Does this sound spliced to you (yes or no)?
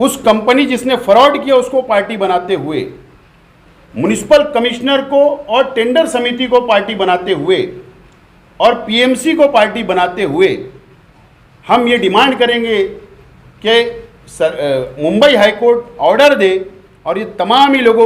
no